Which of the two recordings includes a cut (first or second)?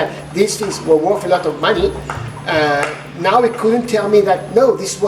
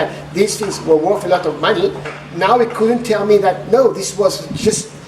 second